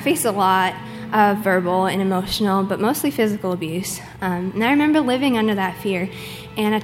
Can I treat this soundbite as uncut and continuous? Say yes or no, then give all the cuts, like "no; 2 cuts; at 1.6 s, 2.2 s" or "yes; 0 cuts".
no; 1 cut; at 4.0 s